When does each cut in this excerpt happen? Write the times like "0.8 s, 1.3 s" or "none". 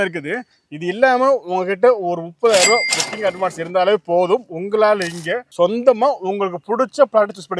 none